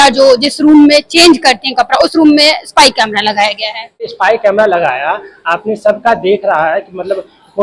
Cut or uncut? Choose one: cut